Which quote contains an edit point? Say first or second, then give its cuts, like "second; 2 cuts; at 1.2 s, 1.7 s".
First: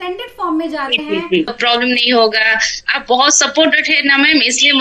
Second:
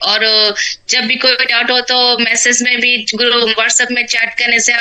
first; 1 cut; at 1.6 s